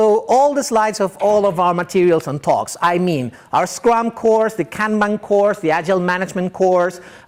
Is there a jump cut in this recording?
no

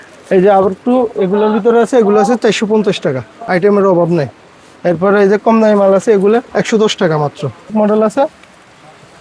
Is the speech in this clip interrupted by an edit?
yes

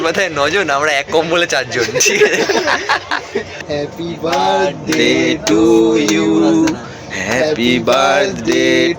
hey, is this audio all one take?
no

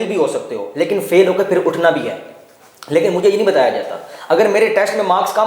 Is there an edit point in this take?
no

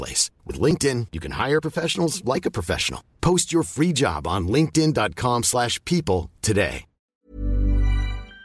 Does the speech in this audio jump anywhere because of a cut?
yes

